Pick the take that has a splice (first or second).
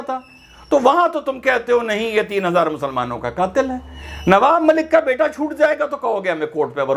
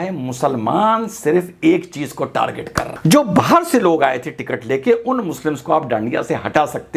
second